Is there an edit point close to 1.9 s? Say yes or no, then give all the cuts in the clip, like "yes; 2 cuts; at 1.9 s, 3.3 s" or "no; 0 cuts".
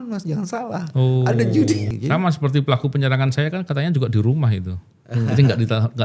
yes; 1 cut; at 1.9 s